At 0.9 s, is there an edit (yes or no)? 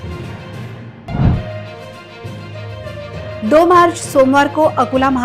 yes